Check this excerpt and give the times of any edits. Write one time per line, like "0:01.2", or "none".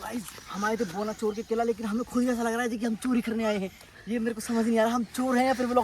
0:03.9